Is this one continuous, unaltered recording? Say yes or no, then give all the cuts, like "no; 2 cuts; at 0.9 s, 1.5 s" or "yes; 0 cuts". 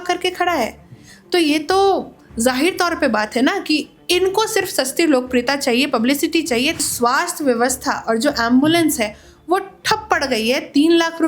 no; 1 cut; at 6.8 s